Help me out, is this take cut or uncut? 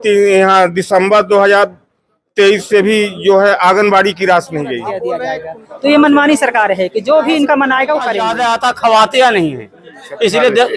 cut